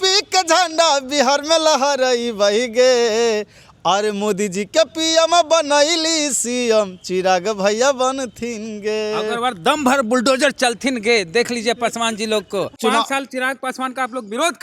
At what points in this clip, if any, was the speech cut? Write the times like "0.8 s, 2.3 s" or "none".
12.8 s